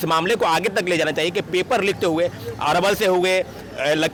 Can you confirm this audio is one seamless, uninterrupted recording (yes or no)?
yes